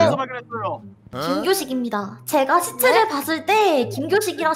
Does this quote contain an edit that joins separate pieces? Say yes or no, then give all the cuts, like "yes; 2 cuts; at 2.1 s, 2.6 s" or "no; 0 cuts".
no; 0 cuts